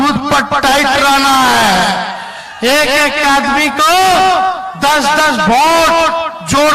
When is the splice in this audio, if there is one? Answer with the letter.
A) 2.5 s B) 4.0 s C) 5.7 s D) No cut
D